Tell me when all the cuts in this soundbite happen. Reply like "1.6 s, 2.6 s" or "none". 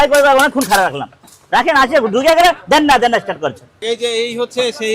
3.8 s